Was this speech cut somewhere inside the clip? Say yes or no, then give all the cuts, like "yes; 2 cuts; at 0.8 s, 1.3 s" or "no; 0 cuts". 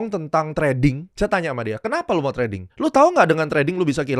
yes; 2 cuts; at 1.1 s, 2.6 s